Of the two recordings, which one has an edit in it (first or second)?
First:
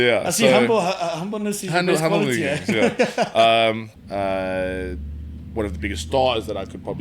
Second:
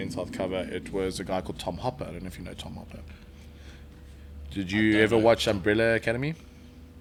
first